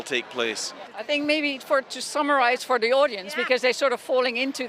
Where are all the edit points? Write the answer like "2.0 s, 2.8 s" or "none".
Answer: 0.9 s

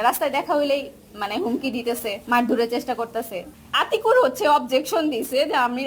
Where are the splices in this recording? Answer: 2.2 s, 3.4 s

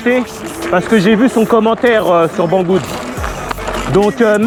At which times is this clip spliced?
none

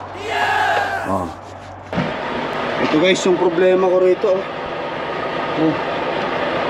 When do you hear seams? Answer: 1.9 s

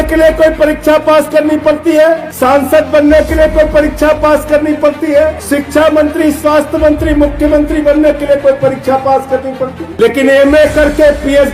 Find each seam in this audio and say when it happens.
2.3 s, 5.4 s, 9.8 s

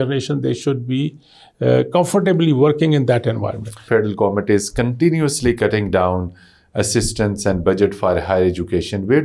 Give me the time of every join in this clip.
3.8 s

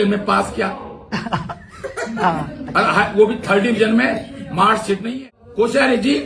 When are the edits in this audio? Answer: 5.1 s

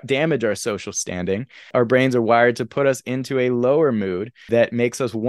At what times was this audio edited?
1.7 s, 4.4 s

